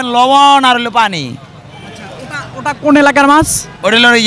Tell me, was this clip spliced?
no; 0 cuts

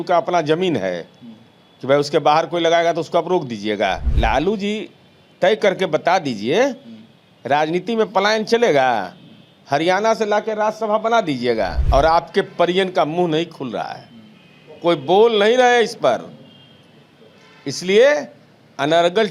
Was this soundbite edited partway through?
yes; 2 cuts; at 4.1 s, 11.8 s

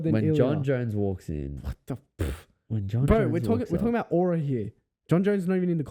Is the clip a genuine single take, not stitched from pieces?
yes; 0 cuts

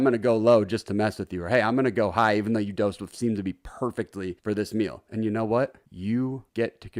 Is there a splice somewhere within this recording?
no; 0 cuts

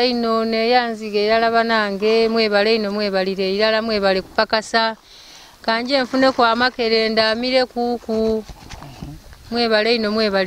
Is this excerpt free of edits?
yes; 0 cuts

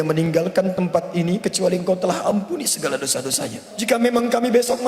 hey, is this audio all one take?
no; 1 cut; at 3.7 s

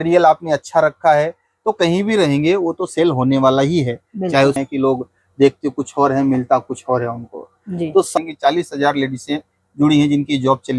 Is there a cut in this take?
yes; 2 cuts; at 4.6 s, 8.2 s

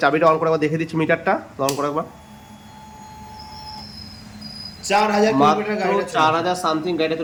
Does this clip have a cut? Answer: no; 0 cuts

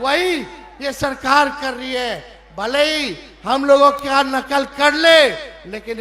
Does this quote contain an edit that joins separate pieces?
no; 0 cuts

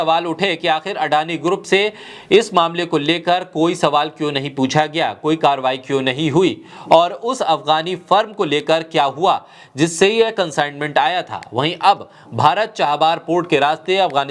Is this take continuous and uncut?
yes; 0 cuts

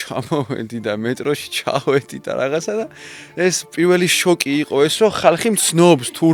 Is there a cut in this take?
no; 0 cuts

